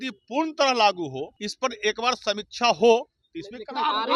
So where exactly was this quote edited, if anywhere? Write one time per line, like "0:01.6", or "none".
0:01.3